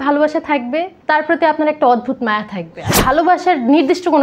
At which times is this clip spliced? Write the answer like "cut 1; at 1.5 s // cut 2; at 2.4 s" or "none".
cut 1; at 0.9 s // cut 2; at 2.8 s